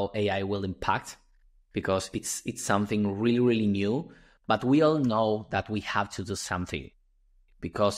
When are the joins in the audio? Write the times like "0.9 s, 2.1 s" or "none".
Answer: none